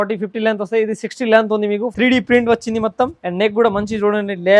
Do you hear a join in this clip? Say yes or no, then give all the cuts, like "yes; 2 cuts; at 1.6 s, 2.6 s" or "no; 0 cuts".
yes; 2 cuts; at 1.9 s, 3.2 s